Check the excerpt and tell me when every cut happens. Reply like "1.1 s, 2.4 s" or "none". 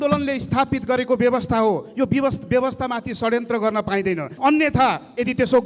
4.3 s